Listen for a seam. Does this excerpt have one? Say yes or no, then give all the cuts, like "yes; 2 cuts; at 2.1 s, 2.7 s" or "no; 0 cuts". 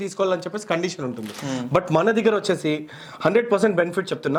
no; 0 cuts